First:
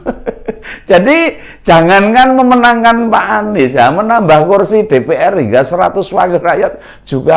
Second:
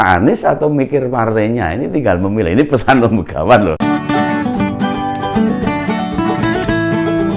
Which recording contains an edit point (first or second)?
second